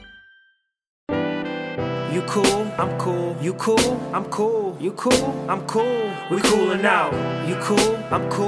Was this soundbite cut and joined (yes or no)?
yes